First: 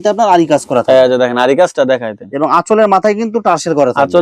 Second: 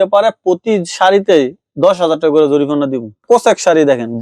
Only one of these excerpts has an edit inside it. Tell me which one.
second; 1 cut; at 3.2 s

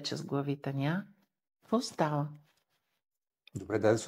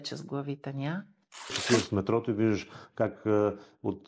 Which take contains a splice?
second; 1 cut; at 1.6 s

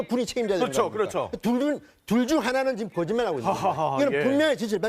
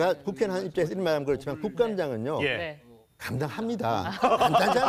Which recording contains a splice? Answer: first; 1 cut; at 2.3 s

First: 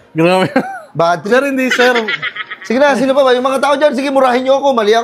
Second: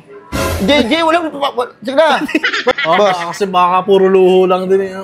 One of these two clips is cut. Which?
second; 1 cut; at 2.8 s

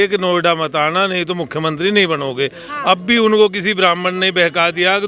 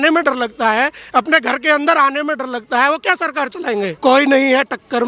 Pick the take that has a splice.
second; 1 cut; at 3.9 s

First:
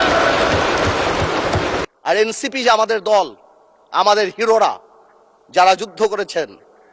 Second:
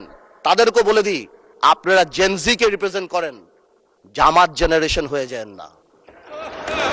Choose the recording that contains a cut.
first; 1 cut; at 1.8 s

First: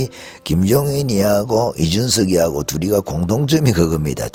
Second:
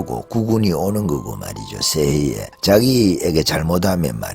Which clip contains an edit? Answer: second; 1 cut; at 2.5 s

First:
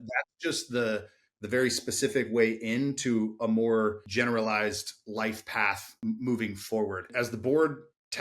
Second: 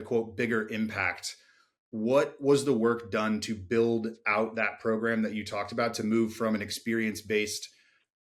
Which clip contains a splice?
first; 3 cuts; at 4.0 s, 6.0 s, 7.1 s

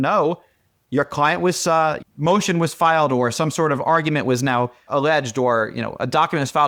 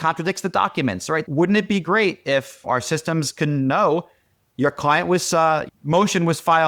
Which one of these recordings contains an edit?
second; 2 cuts; at 1.2 s, 2.6 s

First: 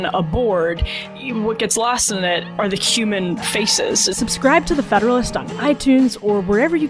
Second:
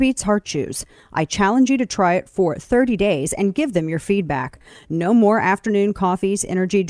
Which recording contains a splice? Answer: first; 2 cuts; at 1.1 s, 4.2 s

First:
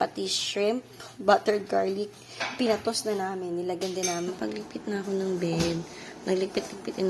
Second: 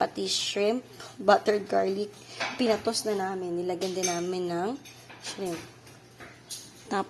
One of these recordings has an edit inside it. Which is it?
first; 1 cut; at 4.3 s

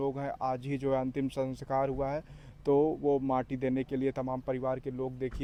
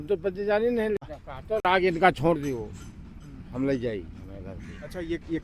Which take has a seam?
second; 1 cut; at 1.0 s

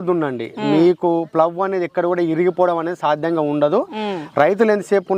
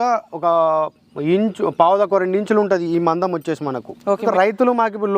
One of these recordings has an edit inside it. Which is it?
second; 1 cut; at 4.2 s

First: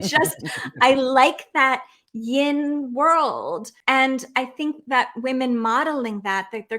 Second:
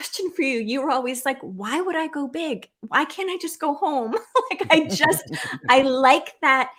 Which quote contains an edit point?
first; 1 cut; at 3.7 s

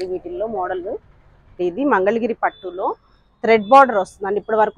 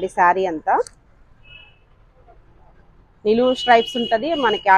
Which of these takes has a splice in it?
first; 1 cut; at 1.6 s

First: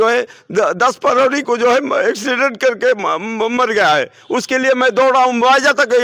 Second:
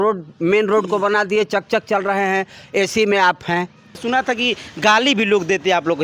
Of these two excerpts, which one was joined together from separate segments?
second; 1 cut; at 4.0 s

